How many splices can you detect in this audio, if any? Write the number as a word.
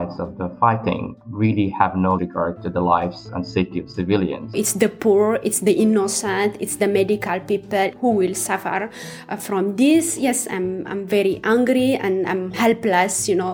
four